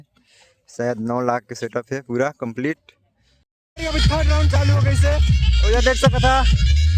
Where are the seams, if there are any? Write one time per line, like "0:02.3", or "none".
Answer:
0:03.5

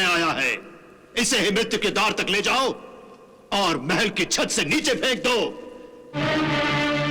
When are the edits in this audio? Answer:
none

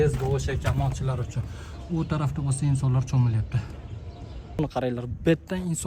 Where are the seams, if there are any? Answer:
0:04.6

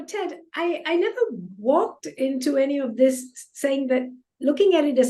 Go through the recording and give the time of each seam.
none

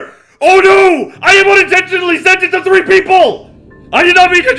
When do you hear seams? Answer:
none

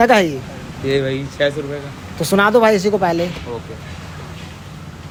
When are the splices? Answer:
none

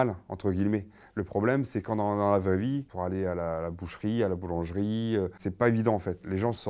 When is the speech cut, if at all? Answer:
0:02.9
0:05.4

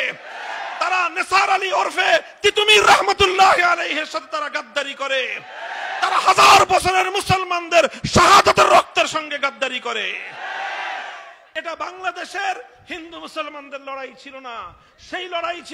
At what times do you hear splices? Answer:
0:11.3

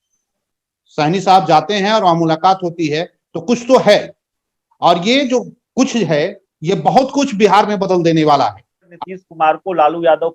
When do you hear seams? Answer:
0:08.9

